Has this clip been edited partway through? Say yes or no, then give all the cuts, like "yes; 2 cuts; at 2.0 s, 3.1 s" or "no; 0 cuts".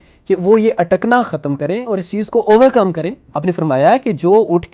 yes; 1 cut; at 3.1 s